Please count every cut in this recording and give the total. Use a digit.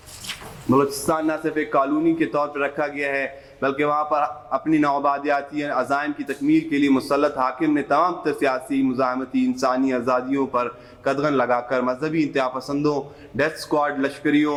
0